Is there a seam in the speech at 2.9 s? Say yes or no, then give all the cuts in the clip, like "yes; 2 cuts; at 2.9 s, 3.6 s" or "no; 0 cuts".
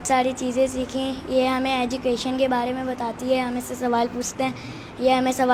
no; 0 cuts